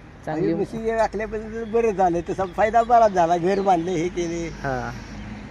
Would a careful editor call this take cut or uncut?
uncut